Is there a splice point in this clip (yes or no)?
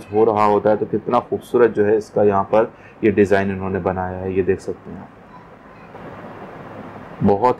yes